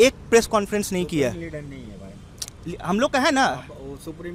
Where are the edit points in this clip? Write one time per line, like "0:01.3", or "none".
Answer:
none